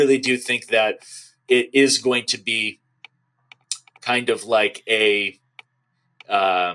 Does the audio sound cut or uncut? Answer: uncut